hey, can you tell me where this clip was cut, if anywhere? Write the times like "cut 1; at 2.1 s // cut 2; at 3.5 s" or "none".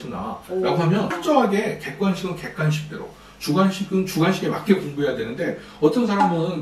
cut 1; at 1.1 s